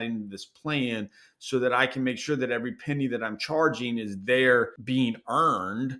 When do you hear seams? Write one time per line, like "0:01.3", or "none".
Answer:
0:04.8